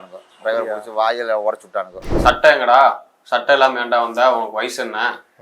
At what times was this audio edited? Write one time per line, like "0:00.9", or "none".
0:02.0